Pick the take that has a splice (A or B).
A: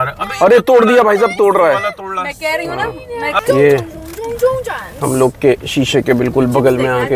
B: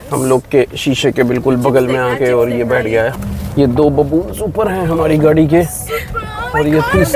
A